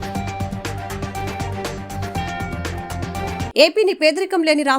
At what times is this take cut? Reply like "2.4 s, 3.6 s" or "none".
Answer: 3.5 s